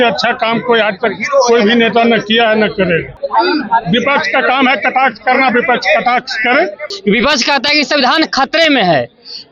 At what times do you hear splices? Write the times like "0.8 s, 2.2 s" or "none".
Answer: 3.2 s, 6.9 s